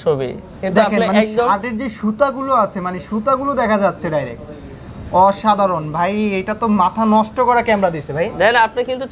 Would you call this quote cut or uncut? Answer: uncut